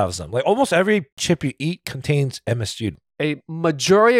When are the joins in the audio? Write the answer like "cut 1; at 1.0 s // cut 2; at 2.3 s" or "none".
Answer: cut 1; at 1.2 s // cut 2; at 2.9 s

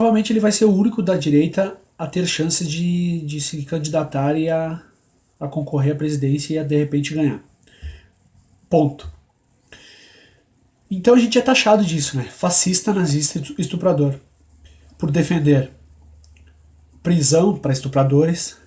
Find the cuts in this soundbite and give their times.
cut 1; at 8.7 s

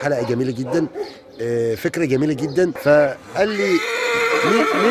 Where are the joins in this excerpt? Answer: cut 1; at 2.8 s

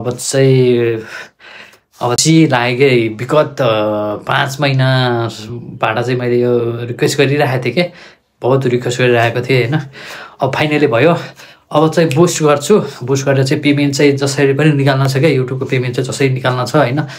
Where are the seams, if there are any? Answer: none

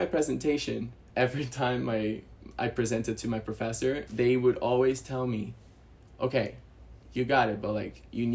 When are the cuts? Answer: cut 1; at 1.0 s // cut 2; at 4.1 s

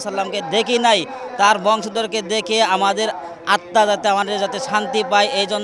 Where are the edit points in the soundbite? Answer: none

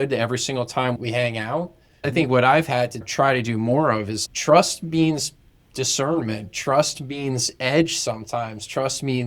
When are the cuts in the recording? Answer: cut 1; at 1.0 s // cut 2; at 3.0 s // cut 3; at 4.1 s

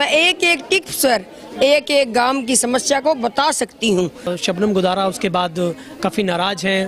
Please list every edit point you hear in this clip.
cut 1; at 4.3 s

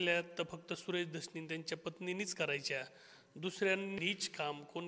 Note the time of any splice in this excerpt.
cut 1; at 4.0 s

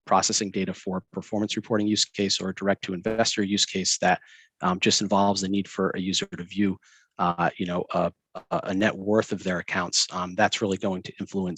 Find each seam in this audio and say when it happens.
none

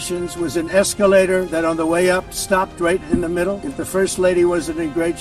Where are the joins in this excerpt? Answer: cut 1; at 3.6 s

